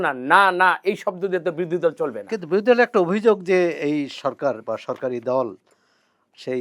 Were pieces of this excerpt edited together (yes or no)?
no